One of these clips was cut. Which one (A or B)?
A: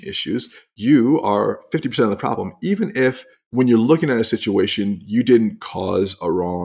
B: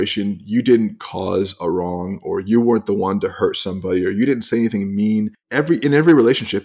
B